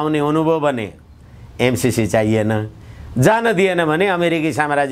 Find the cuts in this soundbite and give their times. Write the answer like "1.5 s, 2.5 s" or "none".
none